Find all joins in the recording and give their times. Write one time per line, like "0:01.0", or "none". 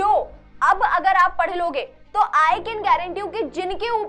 none